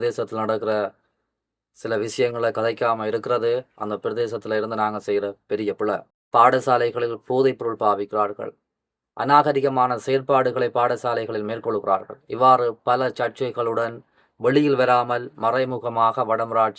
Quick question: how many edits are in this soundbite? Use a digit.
1